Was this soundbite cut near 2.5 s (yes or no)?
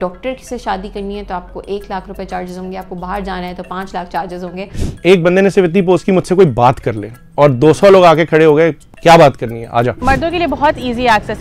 no